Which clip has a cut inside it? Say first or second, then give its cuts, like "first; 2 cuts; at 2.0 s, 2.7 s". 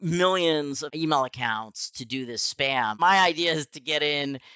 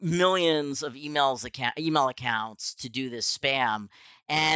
first; 2 cuts; at 0.9 s, 3.0 s